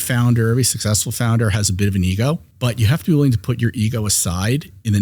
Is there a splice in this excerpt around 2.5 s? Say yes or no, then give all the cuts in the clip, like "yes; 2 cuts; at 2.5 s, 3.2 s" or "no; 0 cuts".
yes; 1 cut; at 2.5 s